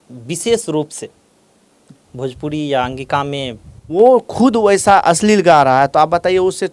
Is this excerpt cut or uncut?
cut